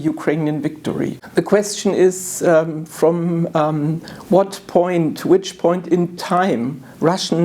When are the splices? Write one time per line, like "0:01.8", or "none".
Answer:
0:01.2